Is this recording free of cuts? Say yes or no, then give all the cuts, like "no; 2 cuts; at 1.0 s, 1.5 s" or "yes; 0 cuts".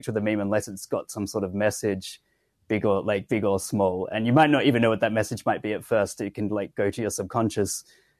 yes; 0 cuts